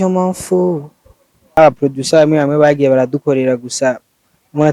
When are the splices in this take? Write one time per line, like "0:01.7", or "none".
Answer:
0:01.6